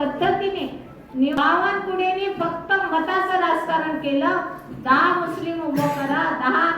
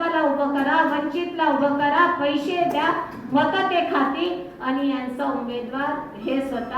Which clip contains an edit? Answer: first; 1 cut; at 1.4 s

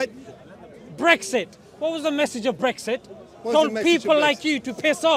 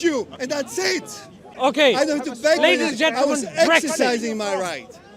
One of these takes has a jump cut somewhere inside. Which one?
second; 1 cut; at 1.5 s

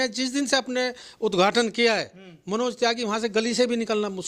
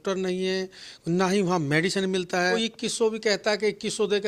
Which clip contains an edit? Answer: second; 1 cut; at 2.6 s

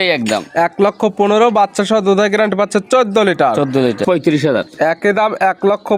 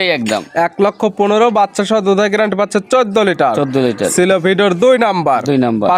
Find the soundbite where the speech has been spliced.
first; 1 cut; at 4.0 s

